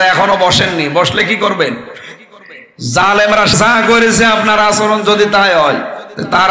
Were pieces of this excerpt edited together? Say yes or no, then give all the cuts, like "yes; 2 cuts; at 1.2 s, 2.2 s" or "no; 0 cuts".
yes; 1 cut; at 3.5 s